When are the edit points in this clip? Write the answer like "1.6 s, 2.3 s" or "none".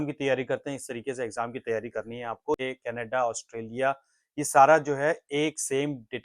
2.6 s